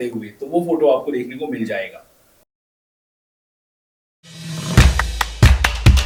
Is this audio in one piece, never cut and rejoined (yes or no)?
yes